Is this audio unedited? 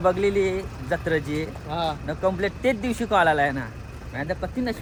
yes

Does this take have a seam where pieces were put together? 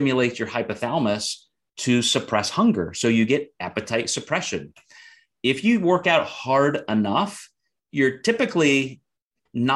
no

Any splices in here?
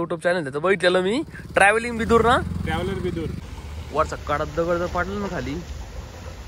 yes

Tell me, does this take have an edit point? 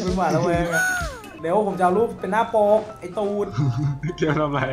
yes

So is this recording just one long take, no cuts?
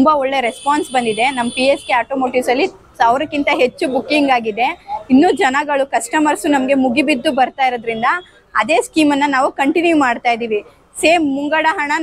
yes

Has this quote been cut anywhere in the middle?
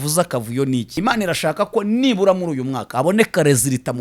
yes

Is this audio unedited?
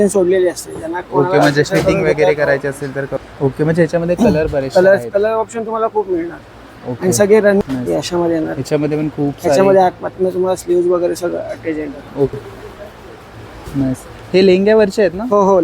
no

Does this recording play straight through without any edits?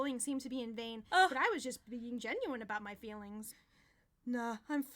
no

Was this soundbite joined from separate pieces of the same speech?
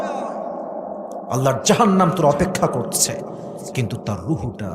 no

